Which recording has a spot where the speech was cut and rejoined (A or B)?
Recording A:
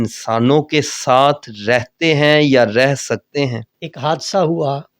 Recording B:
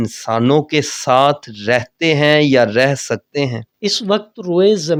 A